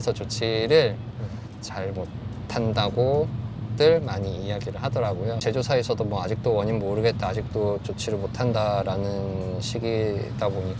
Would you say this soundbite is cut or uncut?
cut